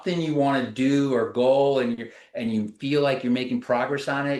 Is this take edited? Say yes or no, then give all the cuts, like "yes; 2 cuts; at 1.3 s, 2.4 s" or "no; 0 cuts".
no; 0 cuts